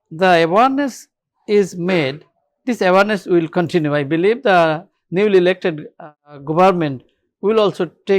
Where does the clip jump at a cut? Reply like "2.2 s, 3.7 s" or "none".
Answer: none